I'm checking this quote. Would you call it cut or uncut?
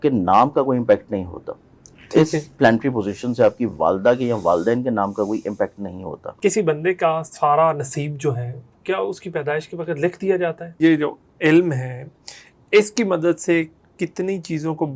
cut